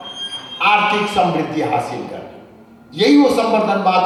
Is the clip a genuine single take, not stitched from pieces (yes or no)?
yes